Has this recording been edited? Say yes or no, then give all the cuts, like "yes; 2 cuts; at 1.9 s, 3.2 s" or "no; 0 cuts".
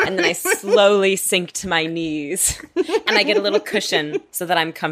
no; 0 cuts